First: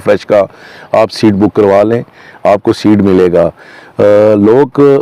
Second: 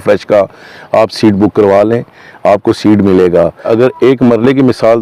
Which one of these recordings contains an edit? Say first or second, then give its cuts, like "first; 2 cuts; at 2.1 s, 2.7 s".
second; 1 cut; at 3.7 s